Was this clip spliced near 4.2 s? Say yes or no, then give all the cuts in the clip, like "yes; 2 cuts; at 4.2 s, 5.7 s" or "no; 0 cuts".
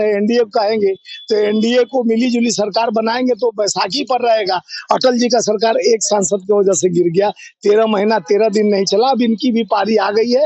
no; 0 cuts